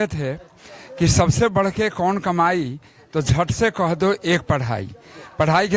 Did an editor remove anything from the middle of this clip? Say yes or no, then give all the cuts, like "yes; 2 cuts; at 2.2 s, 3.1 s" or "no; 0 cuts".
no; 0 cuts